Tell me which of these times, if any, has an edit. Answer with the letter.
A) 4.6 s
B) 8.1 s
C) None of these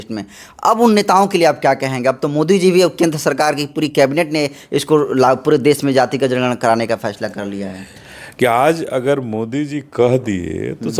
B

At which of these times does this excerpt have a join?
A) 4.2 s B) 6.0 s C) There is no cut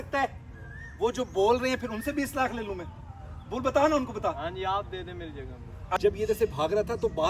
B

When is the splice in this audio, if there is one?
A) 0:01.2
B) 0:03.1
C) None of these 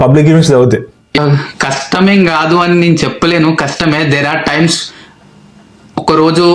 A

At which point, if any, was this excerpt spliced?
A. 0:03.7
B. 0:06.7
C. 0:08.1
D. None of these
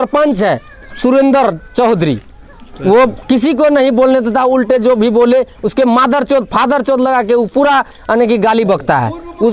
D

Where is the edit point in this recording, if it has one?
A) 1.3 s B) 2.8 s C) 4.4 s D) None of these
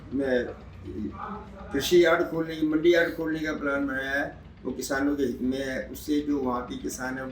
D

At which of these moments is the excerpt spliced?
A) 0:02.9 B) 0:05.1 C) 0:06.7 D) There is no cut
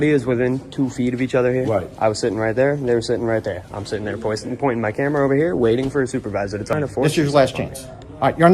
C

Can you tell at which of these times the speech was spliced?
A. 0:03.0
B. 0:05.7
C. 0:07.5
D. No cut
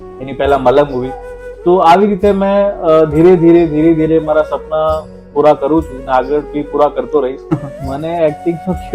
C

